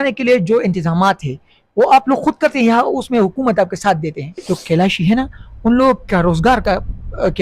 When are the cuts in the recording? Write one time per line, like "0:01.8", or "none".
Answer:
0:04.4